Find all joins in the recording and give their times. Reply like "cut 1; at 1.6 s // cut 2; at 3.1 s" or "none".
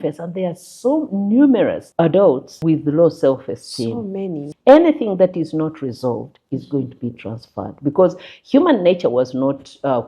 cut 1; at 1.8 s // cut 2; at 2.5 s // cut 3; at 4.5 s